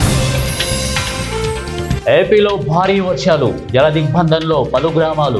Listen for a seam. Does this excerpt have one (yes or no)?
yes